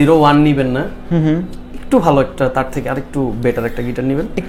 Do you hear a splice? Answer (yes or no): no